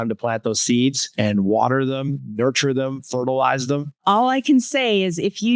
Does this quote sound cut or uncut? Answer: cut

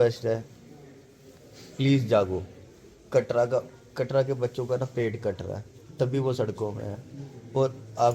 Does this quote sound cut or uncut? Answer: uncut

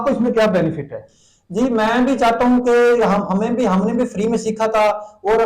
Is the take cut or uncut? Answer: uncut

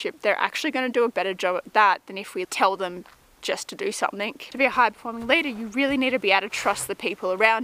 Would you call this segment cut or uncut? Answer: cut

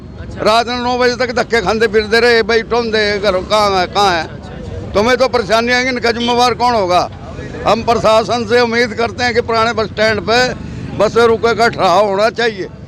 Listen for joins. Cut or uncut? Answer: uncut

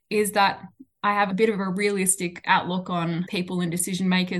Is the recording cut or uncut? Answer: cut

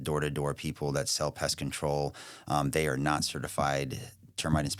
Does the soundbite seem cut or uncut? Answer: uncut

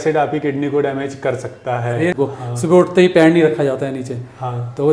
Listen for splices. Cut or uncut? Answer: cut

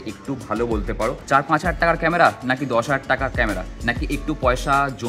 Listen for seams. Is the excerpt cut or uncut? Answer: cut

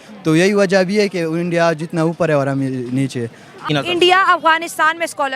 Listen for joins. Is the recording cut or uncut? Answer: cut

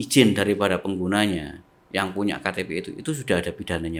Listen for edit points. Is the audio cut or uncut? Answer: uncut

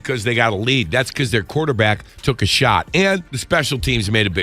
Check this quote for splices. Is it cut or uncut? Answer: cut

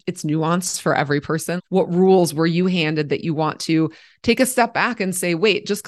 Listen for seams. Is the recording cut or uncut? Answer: cut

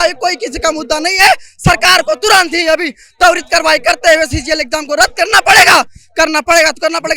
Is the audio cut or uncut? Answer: uncut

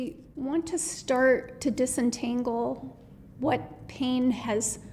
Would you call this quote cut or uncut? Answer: cut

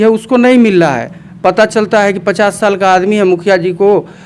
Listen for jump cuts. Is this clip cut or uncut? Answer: uncut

